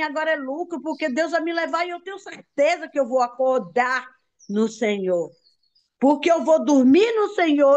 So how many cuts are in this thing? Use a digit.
0